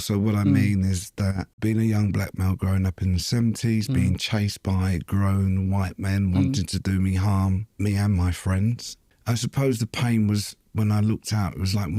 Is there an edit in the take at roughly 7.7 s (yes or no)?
yes